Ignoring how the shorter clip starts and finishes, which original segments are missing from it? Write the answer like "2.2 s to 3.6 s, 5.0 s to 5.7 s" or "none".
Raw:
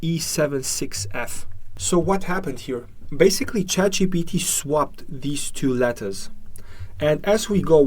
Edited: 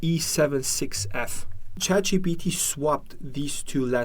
1.8 s to 3.7 s

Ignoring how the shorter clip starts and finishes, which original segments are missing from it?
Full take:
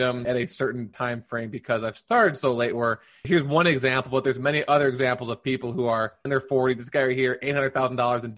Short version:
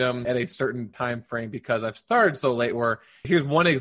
none

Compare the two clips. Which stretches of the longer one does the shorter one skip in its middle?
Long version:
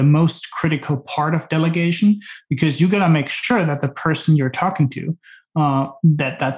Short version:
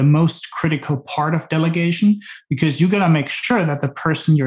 none

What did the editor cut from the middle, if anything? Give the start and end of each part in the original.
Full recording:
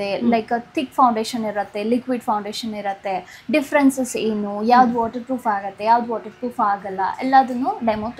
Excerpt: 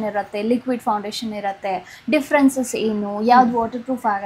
none

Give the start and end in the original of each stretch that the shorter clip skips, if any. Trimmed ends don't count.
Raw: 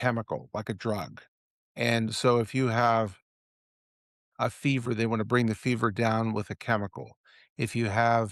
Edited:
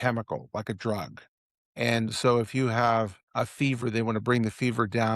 3.2 s to 4.2 s

